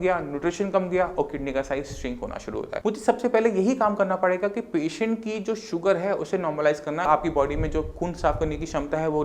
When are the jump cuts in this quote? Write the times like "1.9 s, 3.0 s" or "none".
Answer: 2.7 s, 7.1 s